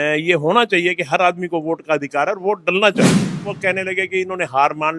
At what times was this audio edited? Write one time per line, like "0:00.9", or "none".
0:03.4